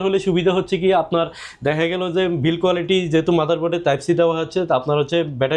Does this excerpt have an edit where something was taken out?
no; 0 cuts

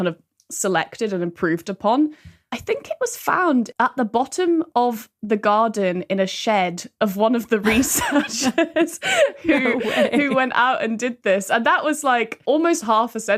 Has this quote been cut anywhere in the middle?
yes; 2 cuts; at 3.7 s, 12.4 s

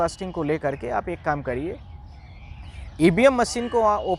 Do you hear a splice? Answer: no; 0 cuts

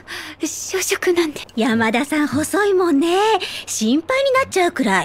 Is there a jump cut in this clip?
yes; 1 cut; at 1.4 s

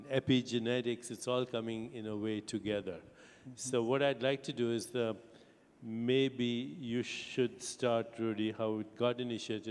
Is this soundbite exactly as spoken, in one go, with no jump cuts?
yes; 0 cuts

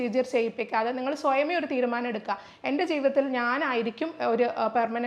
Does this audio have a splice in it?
no; 0 cuts

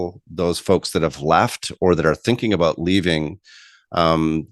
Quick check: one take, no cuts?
yes; 0 cuts

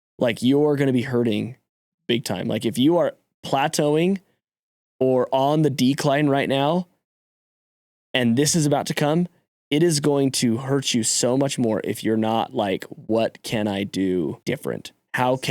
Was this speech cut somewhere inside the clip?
yes; 1 cut; at 14.4 s

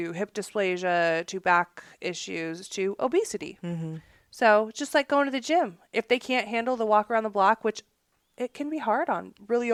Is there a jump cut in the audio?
no; 0 cuts

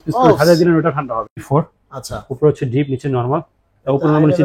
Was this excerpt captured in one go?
no; 1 cut; at 1.5 s

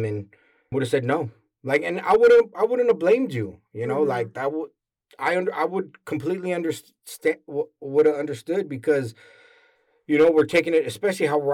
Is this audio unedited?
yes; 0 cuts

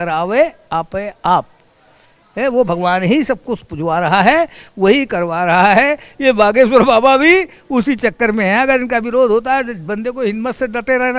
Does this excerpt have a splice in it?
no; 0 cuts

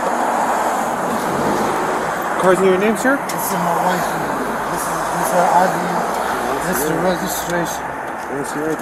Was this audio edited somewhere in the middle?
no; 0 cuts

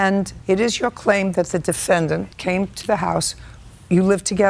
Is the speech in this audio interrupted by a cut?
no; 0 cuts

